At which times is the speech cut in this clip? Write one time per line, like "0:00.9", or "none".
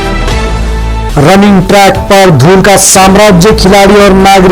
0:01.0

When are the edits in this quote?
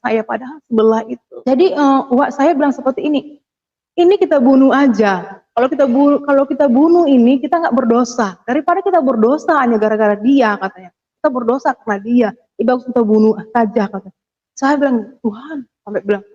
0:01.2

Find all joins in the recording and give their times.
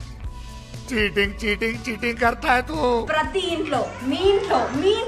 0:03.1

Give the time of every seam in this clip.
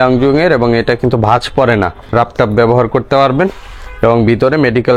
0:02.0

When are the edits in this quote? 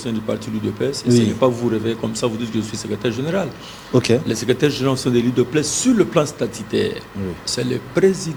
none

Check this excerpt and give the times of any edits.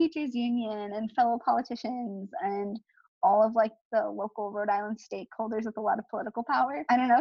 none

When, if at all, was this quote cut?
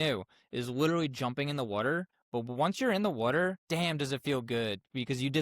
0:02.2
0:03.6

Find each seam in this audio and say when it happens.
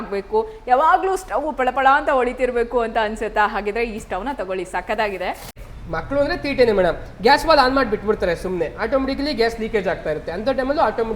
0:05.6

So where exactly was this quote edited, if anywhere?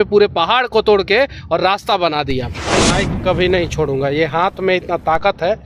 0:02.8

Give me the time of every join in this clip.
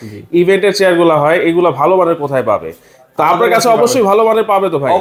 none

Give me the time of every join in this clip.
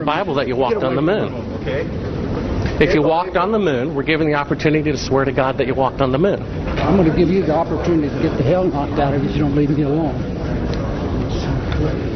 none

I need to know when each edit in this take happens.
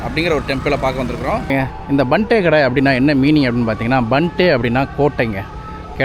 0:01.5

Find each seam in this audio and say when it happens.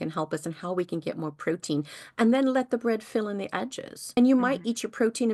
none

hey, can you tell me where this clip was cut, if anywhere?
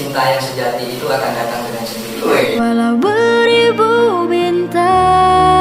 0:02.1

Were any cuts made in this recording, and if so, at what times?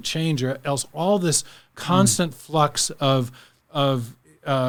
none

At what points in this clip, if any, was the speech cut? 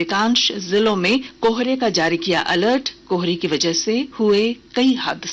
0:01.3
0:04.1

